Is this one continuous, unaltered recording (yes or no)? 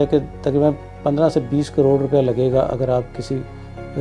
yes